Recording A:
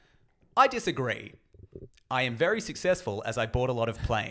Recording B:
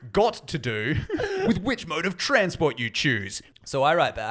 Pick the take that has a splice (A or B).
B